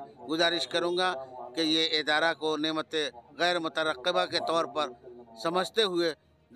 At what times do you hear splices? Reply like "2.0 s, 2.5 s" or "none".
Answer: none